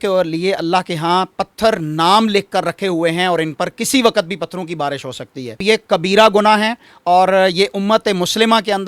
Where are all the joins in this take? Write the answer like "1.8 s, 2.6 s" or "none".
none